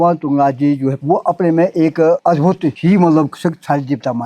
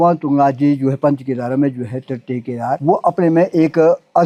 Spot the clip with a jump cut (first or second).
first